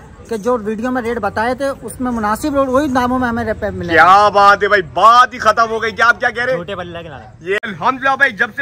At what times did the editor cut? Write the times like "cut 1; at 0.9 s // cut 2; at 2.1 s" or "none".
cut 1; at 7.6 s